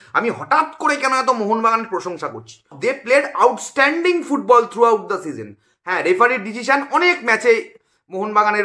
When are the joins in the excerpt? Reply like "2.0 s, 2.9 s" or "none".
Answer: 2.7 s